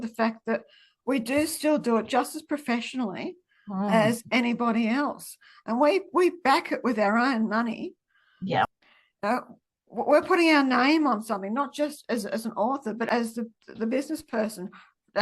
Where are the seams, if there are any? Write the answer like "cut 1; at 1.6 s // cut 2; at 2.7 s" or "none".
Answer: none